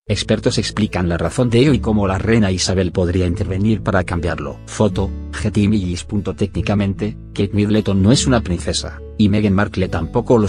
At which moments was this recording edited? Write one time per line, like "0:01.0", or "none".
none

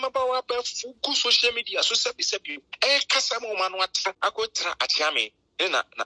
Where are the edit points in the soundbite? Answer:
0:04.2

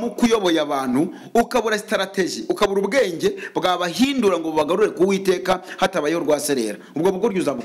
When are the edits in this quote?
none

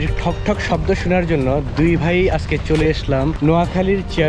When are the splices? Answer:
0:03.3

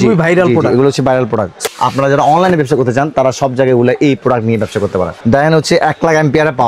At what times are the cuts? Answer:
0:01.6
0:05.2

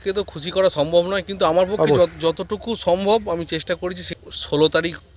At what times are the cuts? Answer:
0:04.0

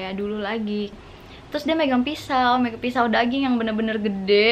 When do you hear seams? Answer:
0:01.0

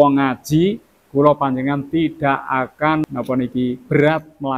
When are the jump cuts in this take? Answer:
0:03.0

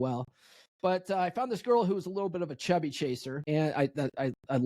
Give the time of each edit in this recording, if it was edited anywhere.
0:03.3

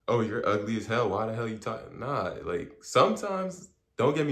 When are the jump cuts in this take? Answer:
none

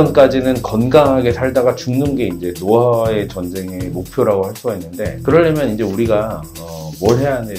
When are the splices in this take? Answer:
none

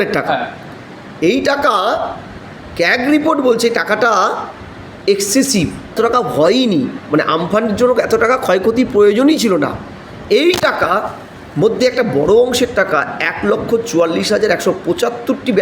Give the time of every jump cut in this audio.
0:05.9

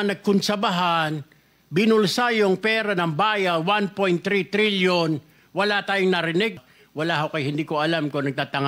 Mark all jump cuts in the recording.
0:06.6

